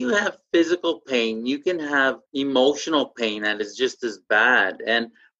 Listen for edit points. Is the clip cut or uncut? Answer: cut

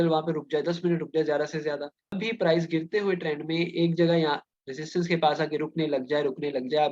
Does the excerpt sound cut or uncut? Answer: cut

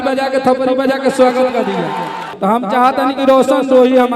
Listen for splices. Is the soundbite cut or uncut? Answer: cut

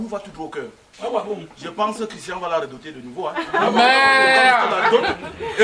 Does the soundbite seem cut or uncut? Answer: uncut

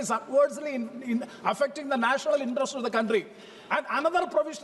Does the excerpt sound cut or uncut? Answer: uncut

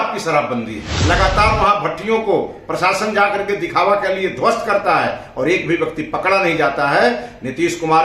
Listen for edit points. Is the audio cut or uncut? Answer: cut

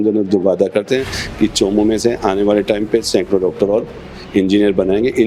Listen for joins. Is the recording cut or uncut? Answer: uncut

